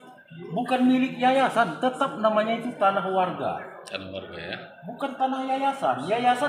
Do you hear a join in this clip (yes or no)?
no